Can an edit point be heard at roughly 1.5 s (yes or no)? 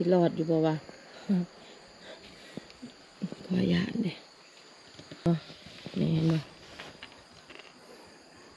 no